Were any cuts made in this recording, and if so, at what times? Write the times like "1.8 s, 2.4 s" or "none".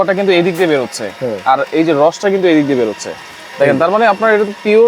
none